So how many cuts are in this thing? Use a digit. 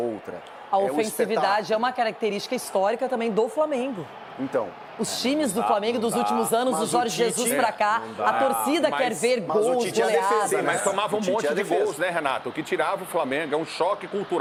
0